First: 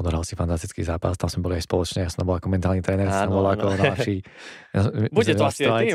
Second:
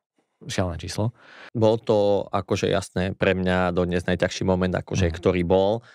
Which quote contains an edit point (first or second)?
second